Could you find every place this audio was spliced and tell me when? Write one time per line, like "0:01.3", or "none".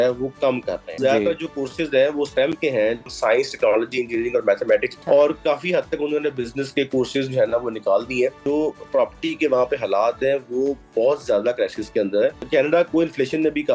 0:01.0
0:03.1
0:04.9
0:08.4
0:12.4